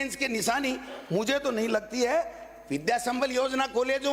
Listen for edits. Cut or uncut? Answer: uncut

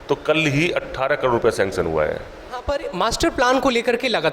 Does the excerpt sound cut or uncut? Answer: cut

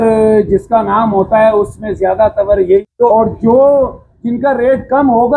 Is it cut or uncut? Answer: cut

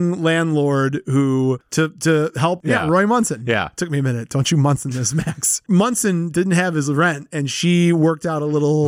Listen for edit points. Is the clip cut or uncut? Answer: cut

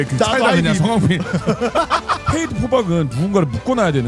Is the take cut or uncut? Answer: cut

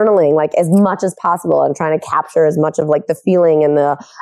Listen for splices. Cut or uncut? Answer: uncut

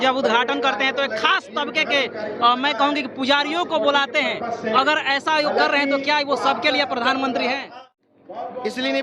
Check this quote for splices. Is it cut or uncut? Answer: cut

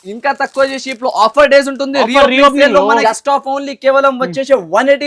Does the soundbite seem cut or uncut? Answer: cut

